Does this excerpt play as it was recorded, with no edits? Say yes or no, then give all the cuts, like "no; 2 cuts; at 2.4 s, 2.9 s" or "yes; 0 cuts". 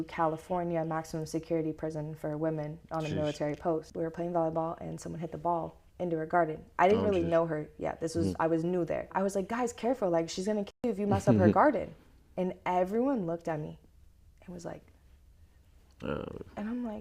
no; 2 cuts; at 3.9 s, 9.1 s